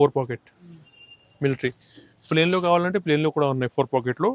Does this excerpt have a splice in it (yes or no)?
no